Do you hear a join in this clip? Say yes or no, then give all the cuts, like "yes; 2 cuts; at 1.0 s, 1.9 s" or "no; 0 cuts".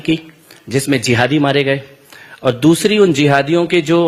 no; 0 cuts